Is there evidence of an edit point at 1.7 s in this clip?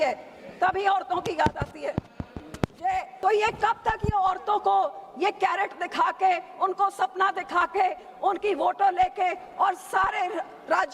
no; 1 cut; at 3.1 s

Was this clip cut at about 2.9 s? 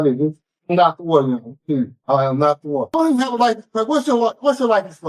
yes; 1 cut; at 2.9 s

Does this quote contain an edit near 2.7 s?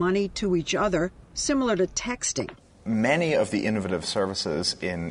yes; 1 cut; at 2.7 s

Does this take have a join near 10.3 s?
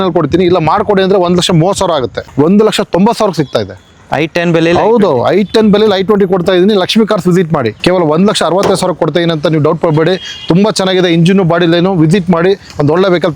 no; 2 cuts; at 2.2 s, 7.7 s

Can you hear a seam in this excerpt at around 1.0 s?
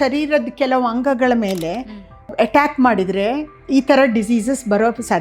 no; 2 cuts; at 2.3 s, 3.6 s

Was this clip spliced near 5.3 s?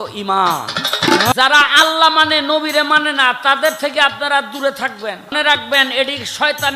yes; 2 cuts; at 1.3 s, 5.3 s

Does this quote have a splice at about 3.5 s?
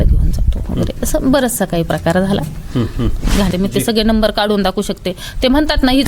yes; 1 cut; at 3.5 s

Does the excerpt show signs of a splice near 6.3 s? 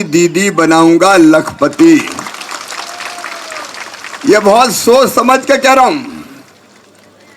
no; 0 cuts

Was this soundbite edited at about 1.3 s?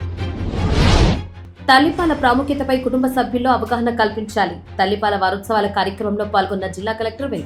yes; 1 cut; at 1.3 s

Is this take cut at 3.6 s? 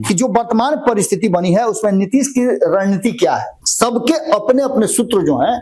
yes; 1 cut; at 3.6 s

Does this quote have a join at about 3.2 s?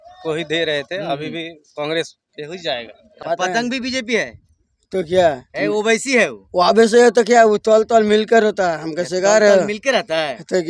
yes; 1 cut; at 3.2 s

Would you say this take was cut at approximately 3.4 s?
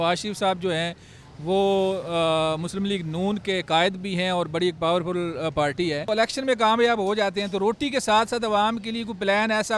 no; 1 cut; at 6.1 s

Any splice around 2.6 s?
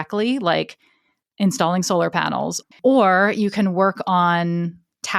yes; 1 cut; at 2.6 s

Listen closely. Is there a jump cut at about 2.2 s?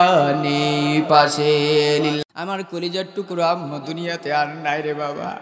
yes; 1 cut; at 2.2 s

